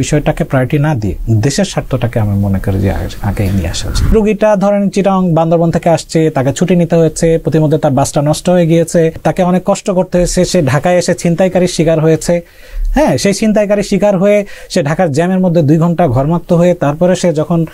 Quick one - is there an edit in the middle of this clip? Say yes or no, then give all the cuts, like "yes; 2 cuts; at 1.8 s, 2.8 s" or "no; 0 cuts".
yes; 2 cuts; at 4.1 s, 9.2 s